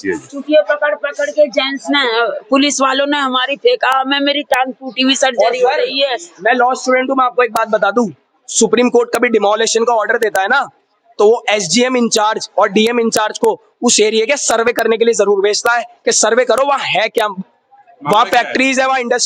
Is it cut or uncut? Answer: uncut